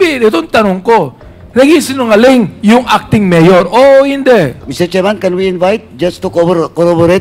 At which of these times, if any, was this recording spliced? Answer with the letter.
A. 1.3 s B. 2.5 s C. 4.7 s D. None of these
C